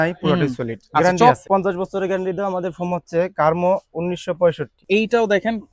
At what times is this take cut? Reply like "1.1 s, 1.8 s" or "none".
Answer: 1.5 s, 4.7 s